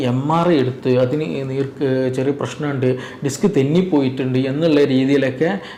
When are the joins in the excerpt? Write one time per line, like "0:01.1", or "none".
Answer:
none